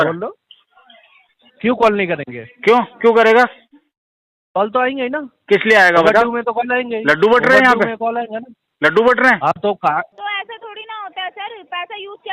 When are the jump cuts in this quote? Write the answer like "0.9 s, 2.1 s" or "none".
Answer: 10.2 s